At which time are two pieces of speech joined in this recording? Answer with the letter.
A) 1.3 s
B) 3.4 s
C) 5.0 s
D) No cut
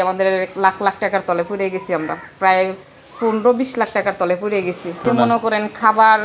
C